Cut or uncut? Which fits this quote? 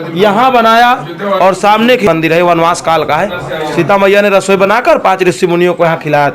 cut